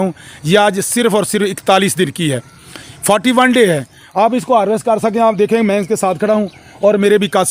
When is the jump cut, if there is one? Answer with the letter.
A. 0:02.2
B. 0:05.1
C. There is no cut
C